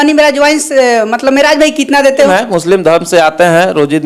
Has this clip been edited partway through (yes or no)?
yes